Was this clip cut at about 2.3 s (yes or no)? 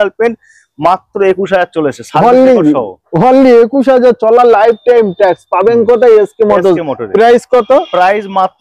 no